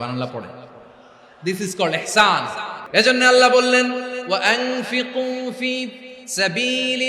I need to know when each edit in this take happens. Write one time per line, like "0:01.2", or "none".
0:02.8